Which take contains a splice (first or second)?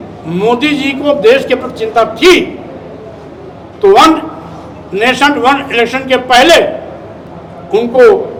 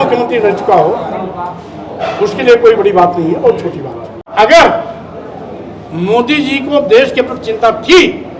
second